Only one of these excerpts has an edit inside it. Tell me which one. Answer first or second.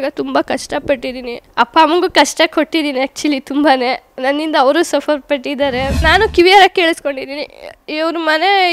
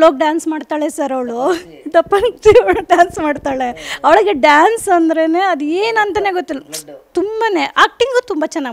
first